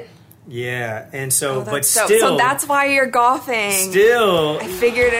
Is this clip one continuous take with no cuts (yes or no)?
yes